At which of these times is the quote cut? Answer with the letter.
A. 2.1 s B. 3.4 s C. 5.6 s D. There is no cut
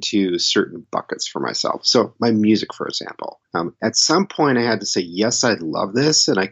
B